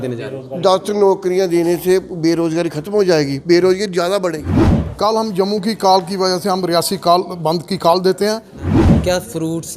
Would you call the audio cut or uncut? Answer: cut